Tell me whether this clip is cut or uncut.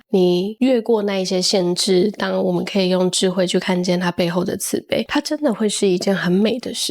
cut